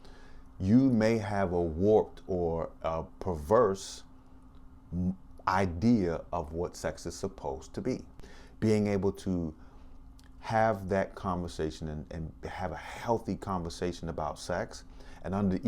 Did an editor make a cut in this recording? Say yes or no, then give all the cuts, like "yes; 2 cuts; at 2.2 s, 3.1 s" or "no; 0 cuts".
yes; 1 cut; at 8.2 s